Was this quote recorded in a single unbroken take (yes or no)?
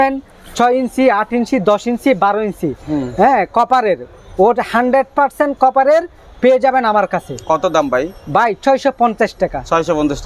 yes